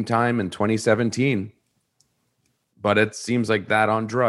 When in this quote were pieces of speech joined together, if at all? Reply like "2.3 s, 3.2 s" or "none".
none